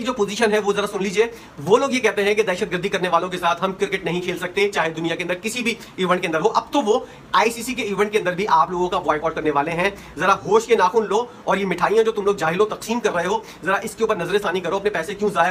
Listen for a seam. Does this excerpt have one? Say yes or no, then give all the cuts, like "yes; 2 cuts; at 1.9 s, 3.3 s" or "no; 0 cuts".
no; 0 cuts